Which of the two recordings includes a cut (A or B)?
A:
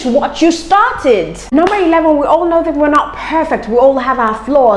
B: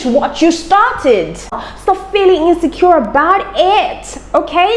B